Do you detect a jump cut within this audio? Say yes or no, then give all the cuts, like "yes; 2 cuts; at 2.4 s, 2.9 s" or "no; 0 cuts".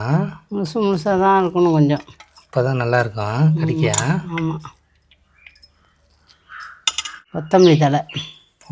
yes; 1 cut; at 7.2 s